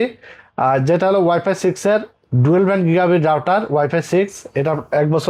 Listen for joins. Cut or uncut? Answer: uncut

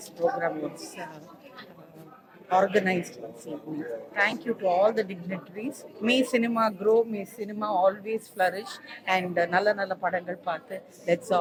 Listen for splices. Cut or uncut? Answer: uncut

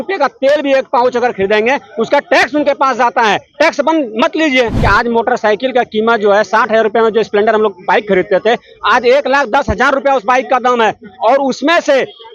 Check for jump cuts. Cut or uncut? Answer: cut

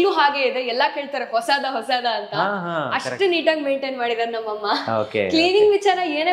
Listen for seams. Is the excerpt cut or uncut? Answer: uncut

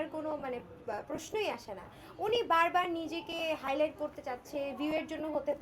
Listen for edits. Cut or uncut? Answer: uncut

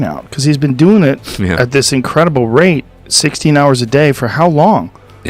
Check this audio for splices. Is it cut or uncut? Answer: uncut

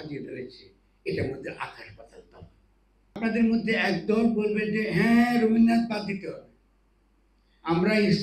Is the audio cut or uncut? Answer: cut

